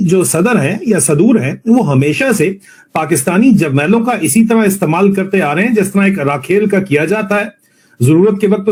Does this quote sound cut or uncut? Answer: uncut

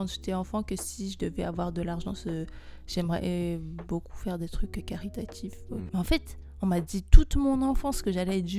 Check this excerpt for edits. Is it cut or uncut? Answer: cut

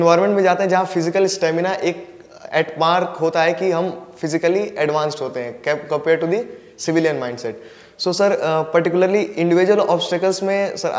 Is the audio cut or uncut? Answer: uncut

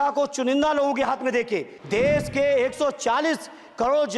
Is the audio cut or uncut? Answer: cut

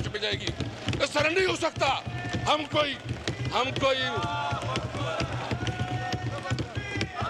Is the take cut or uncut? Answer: uncut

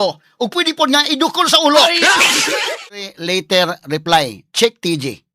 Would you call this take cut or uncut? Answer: cut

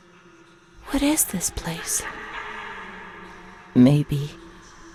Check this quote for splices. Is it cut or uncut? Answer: uncut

